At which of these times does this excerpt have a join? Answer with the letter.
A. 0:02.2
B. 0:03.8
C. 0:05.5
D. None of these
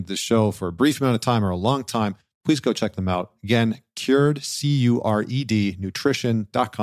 D